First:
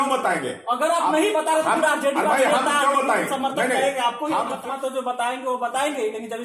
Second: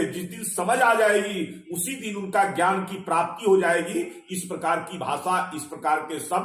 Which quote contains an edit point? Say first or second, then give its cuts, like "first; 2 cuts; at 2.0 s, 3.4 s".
first; 1 cut; at 4.5 s